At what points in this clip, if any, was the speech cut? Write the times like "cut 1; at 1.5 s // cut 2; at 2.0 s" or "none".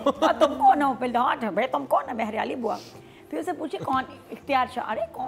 none